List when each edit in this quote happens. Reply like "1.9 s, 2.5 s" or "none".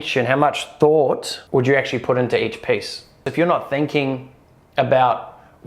1.3 s, 3.3 s

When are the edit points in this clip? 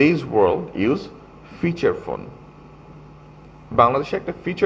3.4 s

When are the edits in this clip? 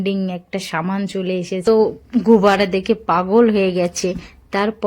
1.6 s

